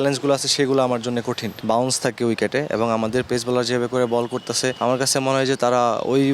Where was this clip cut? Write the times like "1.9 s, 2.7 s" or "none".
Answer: 1.5 s, 4.8 s

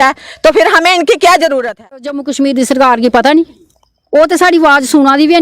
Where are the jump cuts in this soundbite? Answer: 2.2 s

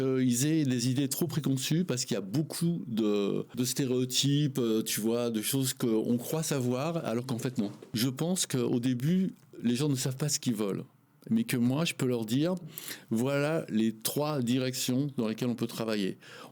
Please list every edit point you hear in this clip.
3.5 s, 7.8 s

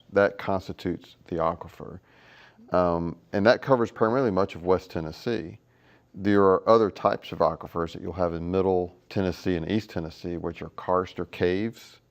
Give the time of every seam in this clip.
7.2 s

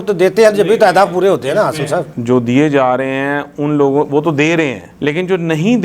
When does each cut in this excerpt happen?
none

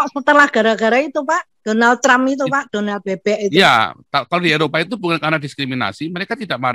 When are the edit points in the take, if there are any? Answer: none

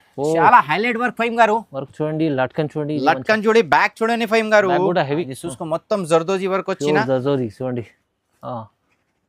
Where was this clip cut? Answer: 5.3 s

